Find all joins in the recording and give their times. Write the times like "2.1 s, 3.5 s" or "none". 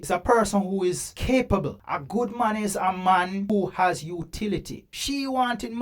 4.8 s